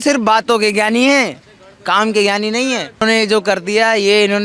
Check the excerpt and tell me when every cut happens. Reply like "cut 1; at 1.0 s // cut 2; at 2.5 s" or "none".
cut 1; at 3.0 s